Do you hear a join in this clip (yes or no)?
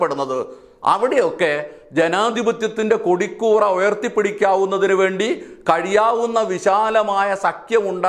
no